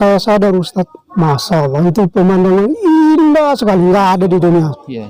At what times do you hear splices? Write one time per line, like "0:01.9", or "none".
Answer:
none